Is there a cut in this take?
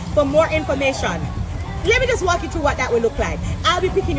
no; 0 cuts

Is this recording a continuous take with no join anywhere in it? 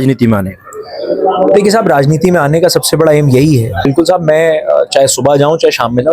no; 1 cut; at 3.9 s

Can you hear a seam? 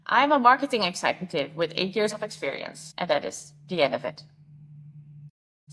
no; 0 cuts

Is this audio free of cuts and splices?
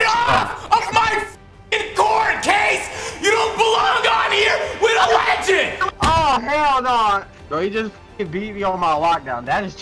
yes; 0 cuts

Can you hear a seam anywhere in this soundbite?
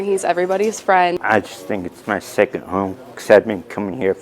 yes; 1 cut; at 1.2 s

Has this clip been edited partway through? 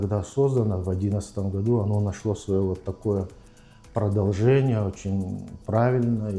no; 0 cuts

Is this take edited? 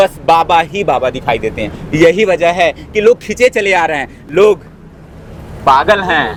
no; 0 cuts

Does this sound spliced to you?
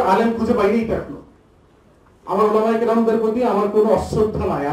no; 0 cuts

